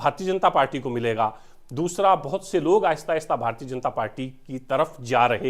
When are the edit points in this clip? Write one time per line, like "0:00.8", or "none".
none

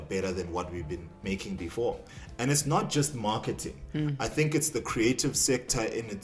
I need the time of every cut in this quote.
0:01.1
0:02.0

